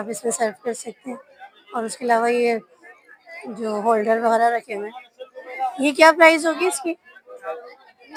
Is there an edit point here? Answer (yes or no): no